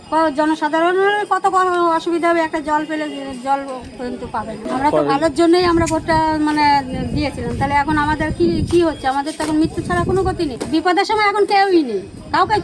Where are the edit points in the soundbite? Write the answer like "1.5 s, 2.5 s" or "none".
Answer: 4.6 s, 10.6 s